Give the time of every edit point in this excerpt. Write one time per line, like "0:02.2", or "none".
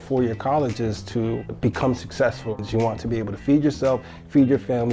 0:02.6